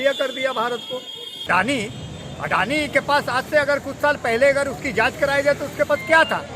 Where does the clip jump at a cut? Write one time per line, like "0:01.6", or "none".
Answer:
0:01.5